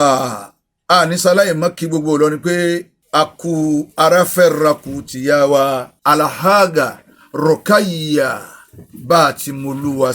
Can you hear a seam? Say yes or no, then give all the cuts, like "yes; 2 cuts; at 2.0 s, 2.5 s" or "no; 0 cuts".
yes; 2 cuts; at 3.0 s, 5.9 s